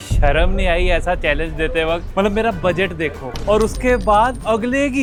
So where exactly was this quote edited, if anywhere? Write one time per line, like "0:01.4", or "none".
none